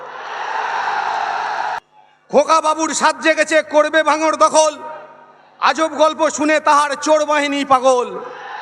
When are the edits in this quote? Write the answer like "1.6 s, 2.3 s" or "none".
1.8 s